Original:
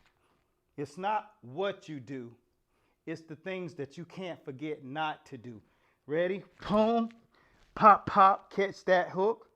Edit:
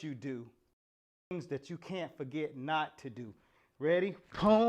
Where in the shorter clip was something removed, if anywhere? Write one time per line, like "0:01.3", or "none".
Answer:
0:01.3